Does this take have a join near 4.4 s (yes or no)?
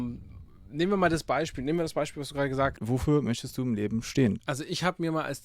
yes